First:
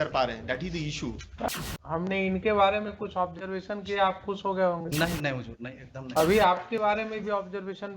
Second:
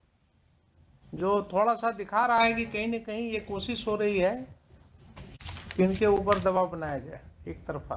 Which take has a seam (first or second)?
first